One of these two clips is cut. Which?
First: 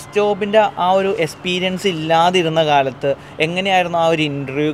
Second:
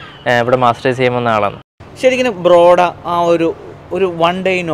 second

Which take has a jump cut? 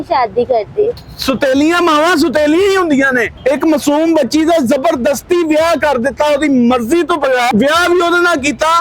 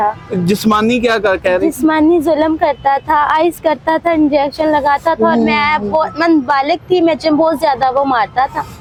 first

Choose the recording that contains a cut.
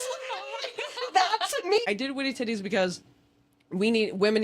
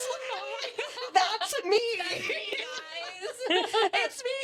first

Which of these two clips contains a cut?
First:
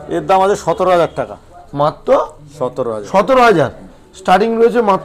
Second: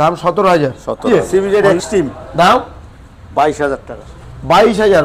second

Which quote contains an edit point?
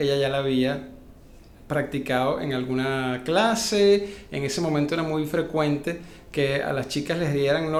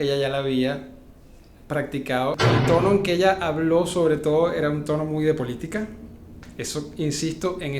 second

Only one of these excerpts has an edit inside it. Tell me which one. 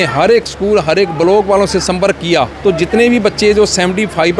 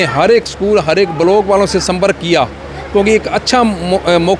first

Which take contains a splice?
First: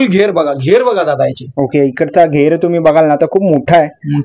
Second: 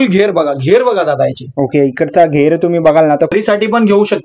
second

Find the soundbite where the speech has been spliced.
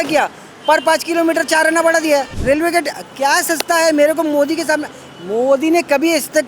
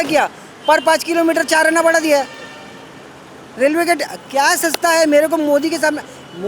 first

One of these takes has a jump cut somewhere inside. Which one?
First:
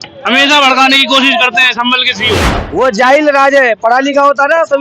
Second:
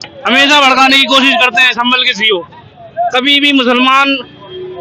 first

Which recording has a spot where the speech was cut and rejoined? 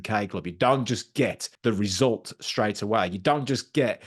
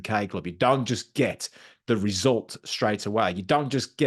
first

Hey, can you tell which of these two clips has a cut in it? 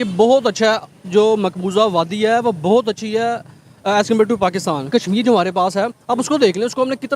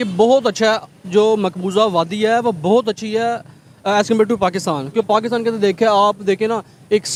first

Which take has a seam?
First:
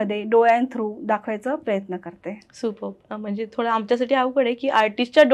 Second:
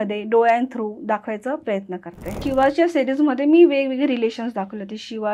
second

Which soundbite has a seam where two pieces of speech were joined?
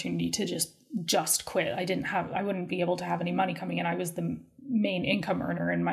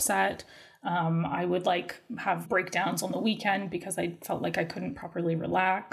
second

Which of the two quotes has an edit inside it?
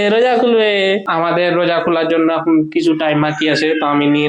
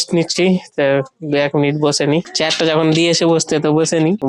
first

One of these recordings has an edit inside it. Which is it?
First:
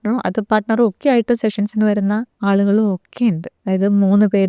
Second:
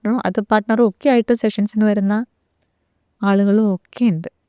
first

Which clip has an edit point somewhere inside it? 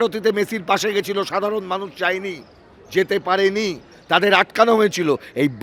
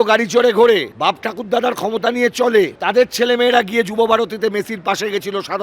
second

